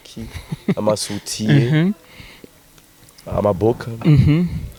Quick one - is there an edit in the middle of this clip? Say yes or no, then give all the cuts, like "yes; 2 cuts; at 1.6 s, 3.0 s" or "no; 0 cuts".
no; 0 cuts